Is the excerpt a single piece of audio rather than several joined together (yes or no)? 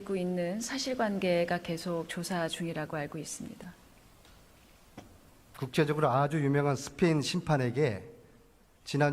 yes